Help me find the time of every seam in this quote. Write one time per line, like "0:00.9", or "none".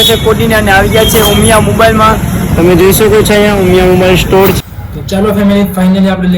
0:05.1